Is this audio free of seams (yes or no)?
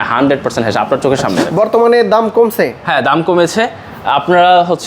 no